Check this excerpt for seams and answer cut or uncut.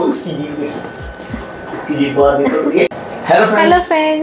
cut